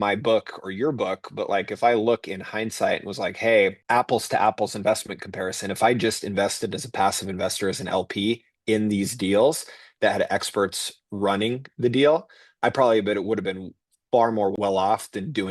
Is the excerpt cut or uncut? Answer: cut